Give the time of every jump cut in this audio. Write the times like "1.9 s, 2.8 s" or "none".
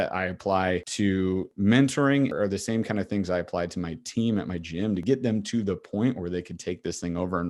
1.4 s, 2.3 s, 5.0 s